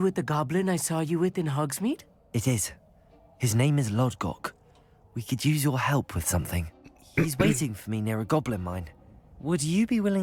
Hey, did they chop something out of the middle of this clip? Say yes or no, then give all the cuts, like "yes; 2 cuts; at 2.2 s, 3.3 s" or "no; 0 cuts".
no; 0 cuts